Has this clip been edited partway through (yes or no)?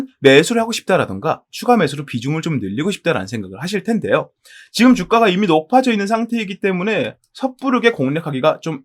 no